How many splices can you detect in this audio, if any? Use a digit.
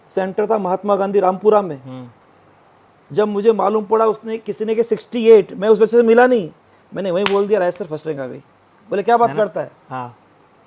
0